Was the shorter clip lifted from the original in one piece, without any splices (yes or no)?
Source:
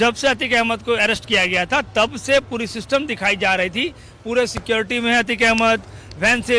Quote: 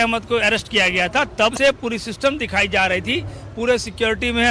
no